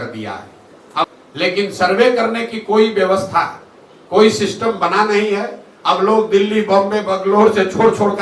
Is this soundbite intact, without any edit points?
no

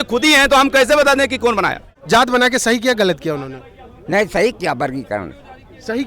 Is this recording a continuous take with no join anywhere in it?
no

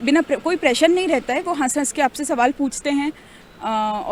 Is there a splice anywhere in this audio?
no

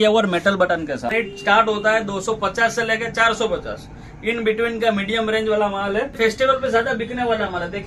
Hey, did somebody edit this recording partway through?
yes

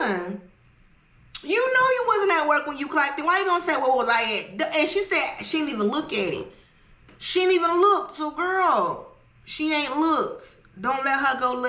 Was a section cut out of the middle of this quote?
no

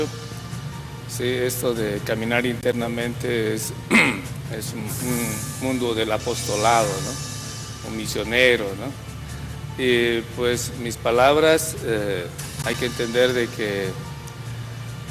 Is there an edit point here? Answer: no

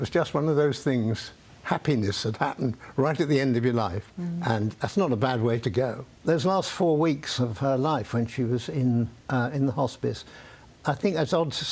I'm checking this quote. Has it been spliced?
yes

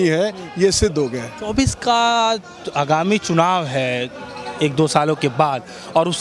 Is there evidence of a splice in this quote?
no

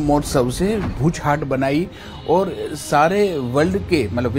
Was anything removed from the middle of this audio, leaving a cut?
yes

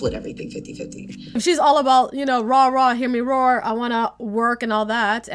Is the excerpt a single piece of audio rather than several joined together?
no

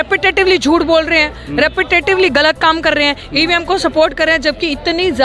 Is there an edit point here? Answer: no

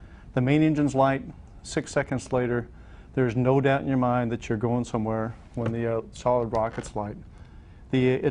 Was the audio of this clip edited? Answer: no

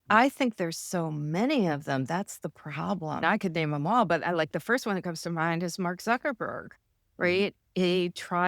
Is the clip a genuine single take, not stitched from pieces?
no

